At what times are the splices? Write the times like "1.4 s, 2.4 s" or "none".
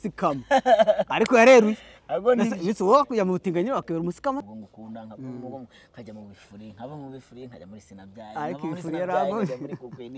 4.5 s